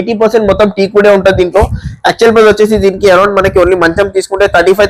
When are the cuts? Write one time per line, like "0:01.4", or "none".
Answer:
none